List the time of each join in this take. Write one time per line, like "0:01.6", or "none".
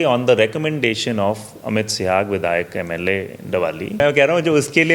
0:04.0

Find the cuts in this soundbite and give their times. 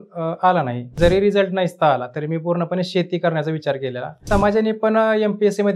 0:00.9
0:04.2

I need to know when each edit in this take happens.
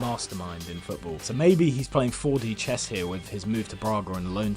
0:01.2

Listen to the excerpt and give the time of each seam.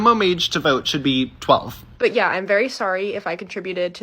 0:01.8

